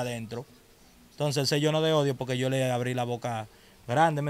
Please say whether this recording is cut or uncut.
uncut